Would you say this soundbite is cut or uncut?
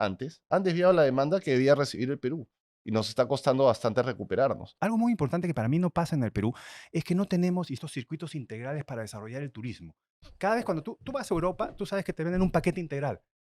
cut